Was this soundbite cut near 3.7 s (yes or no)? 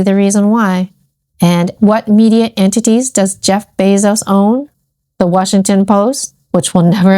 no